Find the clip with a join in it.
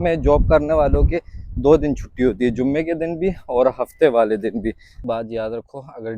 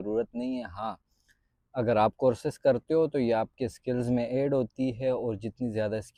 first; 1 cut; at 5.0 s

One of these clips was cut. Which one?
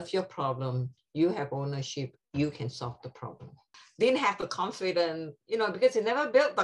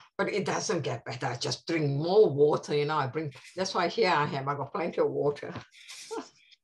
first; 1 cut; at 3.8 s

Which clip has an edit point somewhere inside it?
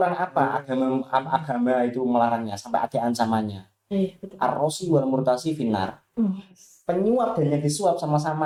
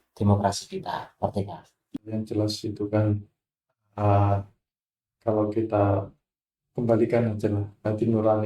second; 1 cut; at 1.9 s

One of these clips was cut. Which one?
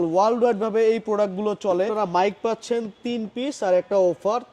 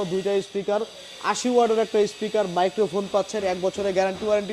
first; 1 cut; at 1.9 s

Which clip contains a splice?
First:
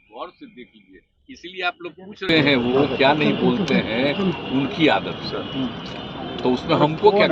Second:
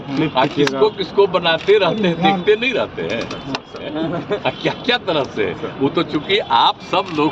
first; 1 cut; at 2.2 s

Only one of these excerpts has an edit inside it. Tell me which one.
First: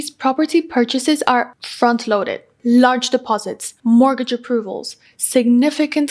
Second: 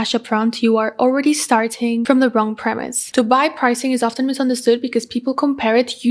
second; 2 cuts; at 2.0 s, 3.0 s

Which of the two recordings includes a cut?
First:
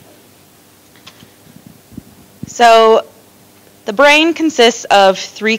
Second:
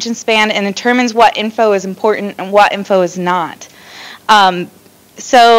second; 1 cut; at 2.3 s

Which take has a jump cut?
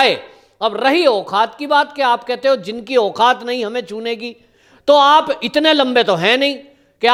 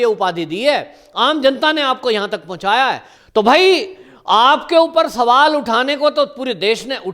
second; 1 cut; at 3.1 s

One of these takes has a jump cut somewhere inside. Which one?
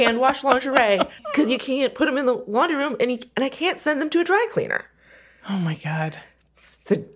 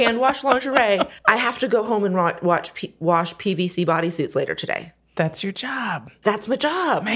first; 1 cut; at 1.3 s

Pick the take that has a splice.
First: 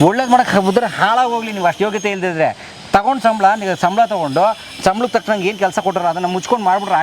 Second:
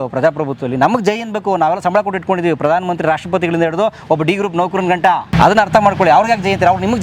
second; 1 cut; at 5.3 s

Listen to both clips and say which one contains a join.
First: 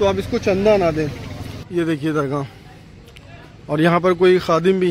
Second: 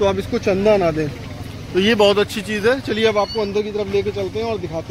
first; 1 cut; at 1.6 s

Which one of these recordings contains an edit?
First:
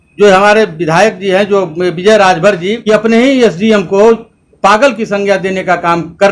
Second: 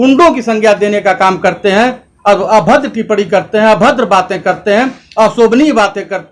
first; 1 cut; at 2.8 s

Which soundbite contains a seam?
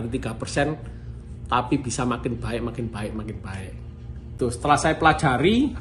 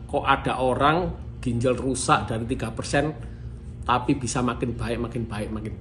first; 1 cut; at 4.4 s

